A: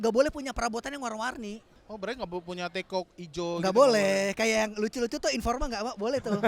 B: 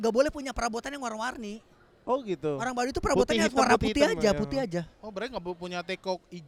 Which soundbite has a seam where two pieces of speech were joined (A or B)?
A